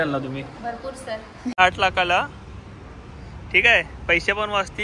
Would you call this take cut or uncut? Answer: cut